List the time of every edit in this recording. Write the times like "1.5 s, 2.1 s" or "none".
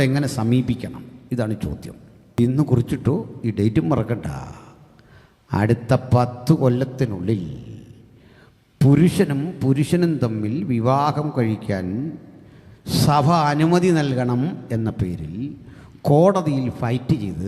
2.4 s